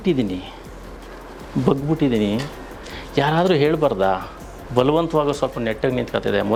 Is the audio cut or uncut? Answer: uncut